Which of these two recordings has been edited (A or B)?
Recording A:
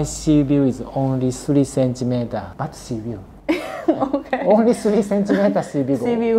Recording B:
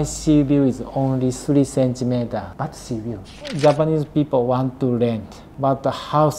B